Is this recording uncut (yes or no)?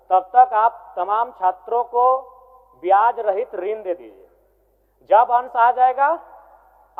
yes